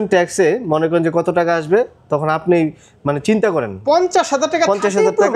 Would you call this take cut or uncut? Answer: cut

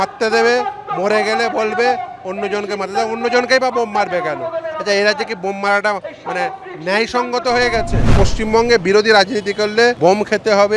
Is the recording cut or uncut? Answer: cut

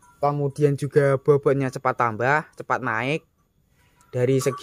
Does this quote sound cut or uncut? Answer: uncut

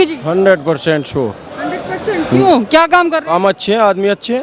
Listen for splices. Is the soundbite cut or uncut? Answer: uncut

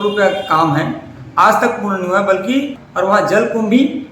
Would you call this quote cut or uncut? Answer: cut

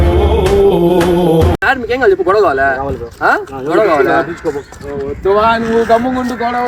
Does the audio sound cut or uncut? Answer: cut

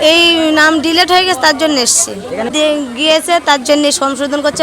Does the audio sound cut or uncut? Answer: cut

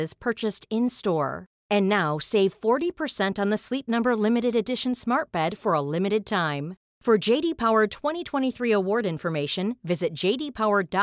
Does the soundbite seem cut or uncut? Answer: uncut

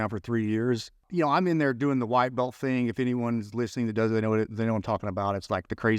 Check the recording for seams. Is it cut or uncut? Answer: cut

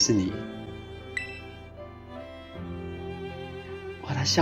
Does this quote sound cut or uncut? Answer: uncut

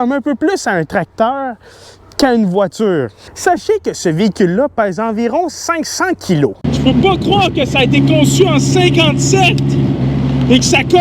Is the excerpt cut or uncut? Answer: cut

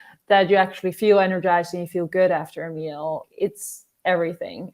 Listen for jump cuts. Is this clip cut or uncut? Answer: cut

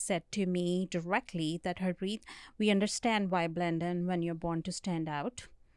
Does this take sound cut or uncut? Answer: uncut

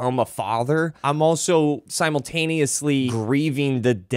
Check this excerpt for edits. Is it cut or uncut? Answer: cut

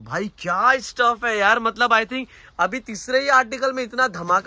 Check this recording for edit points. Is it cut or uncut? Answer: uncut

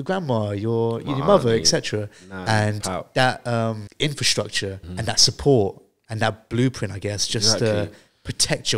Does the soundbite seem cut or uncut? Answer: cut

